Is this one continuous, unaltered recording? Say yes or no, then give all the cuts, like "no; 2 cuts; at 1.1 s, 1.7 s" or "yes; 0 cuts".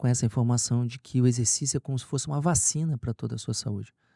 yes; 0 cuts